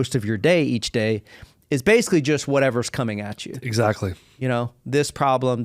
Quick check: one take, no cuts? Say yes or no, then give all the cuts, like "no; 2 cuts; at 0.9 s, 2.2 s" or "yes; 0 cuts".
yes; 0 cuts